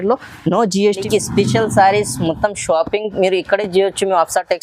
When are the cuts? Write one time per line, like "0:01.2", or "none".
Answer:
0:01.0